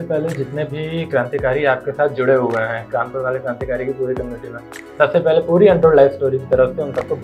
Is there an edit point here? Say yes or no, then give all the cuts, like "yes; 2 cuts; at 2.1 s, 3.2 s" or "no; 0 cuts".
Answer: no; 0 cuts